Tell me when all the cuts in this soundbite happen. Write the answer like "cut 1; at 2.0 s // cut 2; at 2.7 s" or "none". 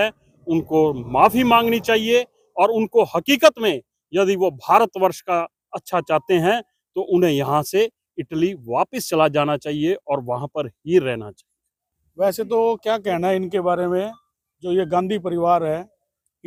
none